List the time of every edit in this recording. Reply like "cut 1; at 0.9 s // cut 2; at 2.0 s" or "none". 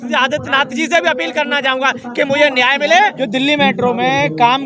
cut 1; at 3.2 s